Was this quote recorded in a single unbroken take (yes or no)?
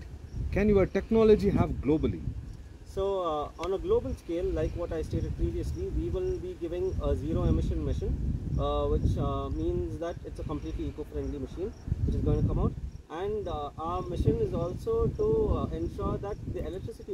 yes